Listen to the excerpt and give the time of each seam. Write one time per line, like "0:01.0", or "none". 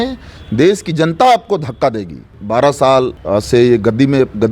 0:02.4
0:03.2